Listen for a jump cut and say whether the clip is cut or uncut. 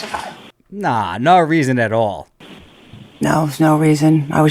uncut